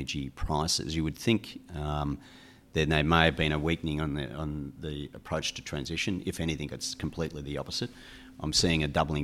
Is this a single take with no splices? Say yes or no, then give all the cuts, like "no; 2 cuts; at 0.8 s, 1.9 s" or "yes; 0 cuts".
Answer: yes; 0 cuts